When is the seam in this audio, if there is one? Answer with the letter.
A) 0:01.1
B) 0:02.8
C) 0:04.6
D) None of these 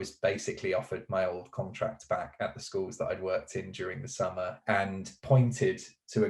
C